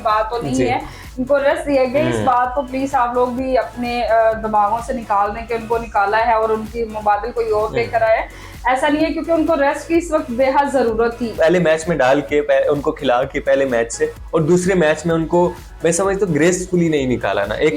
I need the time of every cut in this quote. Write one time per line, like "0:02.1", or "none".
0:11.3

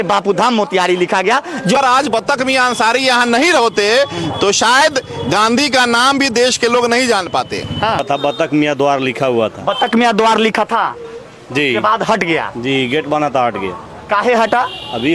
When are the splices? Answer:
0:01.8
0:08.0

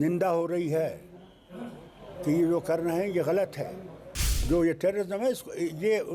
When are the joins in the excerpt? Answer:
0:04.3

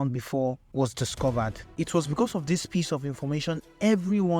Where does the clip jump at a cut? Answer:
0:01.6

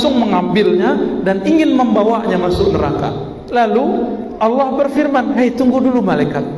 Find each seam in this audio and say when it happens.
0:03.3

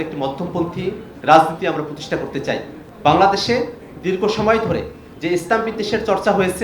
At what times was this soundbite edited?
0:01.1
0:02.8
0:05.0

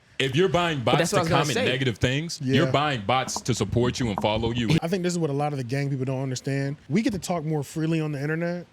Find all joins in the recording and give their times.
0:04.8
0:06.8

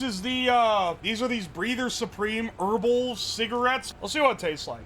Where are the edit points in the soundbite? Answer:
0:01.0
0:03.9

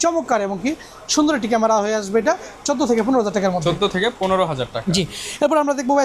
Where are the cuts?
none

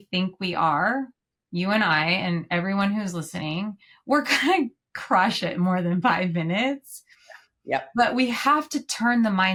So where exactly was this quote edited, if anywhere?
none

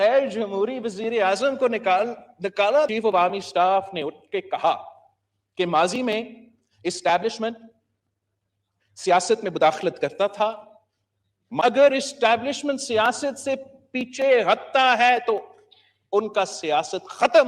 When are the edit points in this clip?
0:02.9
0:11.6

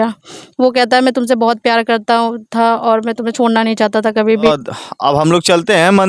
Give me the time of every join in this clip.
0:04.2

